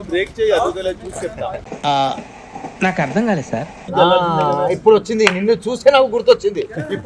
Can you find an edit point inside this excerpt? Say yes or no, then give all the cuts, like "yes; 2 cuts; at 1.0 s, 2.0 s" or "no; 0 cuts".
yes; 1 cut; at 3.9 s